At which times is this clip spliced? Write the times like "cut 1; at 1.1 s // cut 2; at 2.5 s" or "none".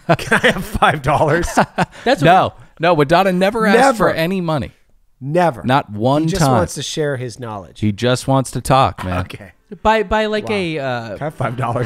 none